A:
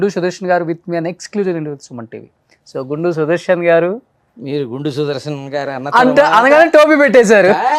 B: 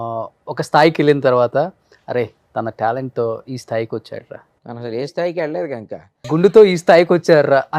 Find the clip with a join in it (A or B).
B